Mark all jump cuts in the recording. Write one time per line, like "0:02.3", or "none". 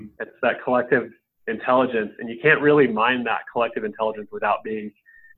none